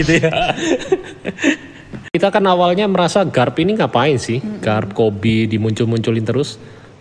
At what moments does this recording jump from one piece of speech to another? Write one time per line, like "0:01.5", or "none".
0:02.1